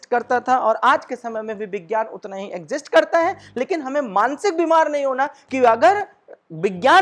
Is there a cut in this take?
no; 0 cuts

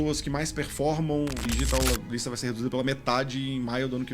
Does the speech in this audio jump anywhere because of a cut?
yes; 1 cut; at 1.7 s

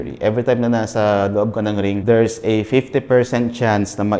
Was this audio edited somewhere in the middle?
yes; 1 cut; at 2.0 s

